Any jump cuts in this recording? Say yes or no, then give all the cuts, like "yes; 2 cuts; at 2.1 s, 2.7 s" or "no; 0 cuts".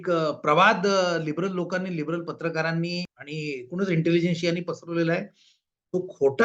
yes; 1 cut; at 3.2 s